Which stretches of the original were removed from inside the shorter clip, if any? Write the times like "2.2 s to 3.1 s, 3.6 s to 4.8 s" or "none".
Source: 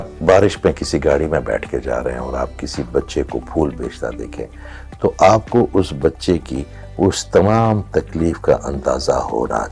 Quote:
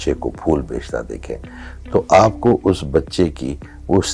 none